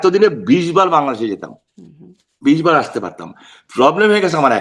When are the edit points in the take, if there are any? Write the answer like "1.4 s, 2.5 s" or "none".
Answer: none